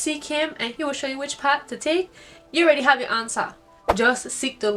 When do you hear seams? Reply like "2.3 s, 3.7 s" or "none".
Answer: none